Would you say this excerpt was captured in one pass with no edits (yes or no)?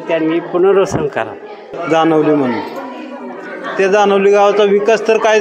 no